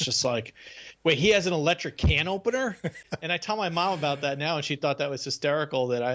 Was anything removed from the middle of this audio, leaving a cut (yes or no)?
yes